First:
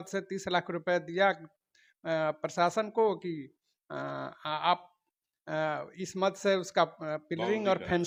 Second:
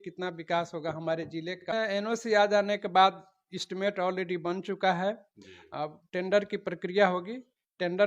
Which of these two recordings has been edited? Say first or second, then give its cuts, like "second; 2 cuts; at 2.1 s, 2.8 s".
second; 1 cut; at 1.6 s